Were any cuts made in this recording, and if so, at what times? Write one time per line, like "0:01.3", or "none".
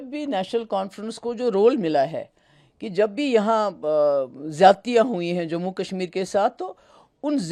none